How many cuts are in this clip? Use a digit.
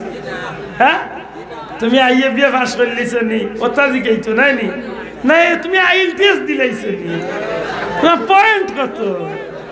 0